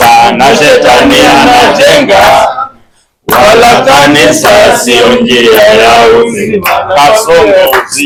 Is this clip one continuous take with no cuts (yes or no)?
yes